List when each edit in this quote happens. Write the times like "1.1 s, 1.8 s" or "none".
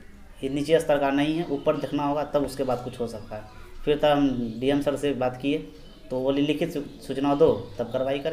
none